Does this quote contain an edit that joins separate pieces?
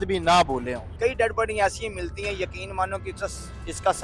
yes; 1 cut; at 0.9 s

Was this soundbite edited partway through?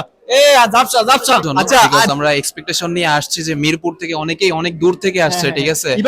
yes; 1 cut; at 2.1 s

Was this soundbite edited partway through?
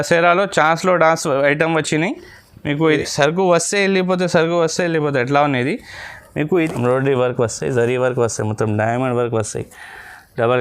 yes; 2 cuts; at 2.9 s, 6.7 s

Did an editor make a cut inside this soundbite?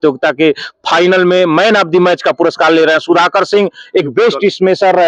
no; 0 cuts

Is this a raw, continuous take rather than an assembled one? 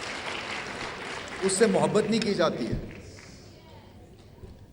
yes; 0 cuts

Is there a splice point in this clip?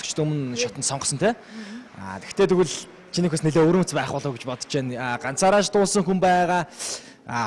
yes; 1 cut; at 2.2 s

